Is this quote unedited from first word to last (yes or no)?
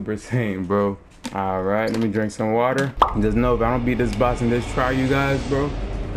no